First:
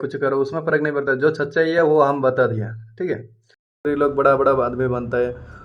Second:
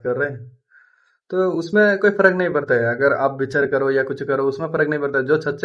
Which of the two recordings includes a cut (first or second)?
first